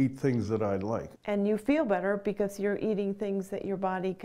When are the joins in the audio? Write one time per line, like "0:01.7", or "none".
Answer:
0:01.1